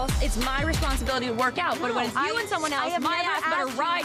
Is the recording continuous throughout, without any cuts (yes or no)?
yes